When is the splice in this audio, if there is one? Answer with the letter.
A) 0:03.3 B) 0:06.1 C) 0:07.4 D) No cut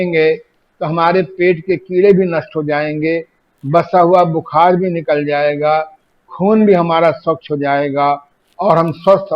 D